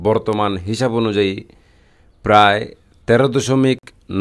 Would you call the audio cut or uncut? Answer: uncut